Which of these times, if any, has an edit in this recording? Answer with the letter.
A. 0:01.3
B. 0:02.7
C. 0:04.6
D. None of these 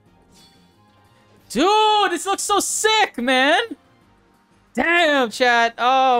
D